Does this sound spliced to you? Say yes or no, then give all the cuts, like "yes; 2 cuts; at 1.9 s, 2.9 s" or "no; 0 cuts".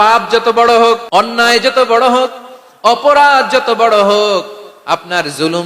yes; 1 cut; at 1.0 s